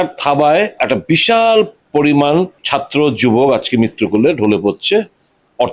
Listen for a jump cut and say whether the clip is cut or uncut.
cut